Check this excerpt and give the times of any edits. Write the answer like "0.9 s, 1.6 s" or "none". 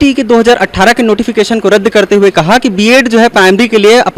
none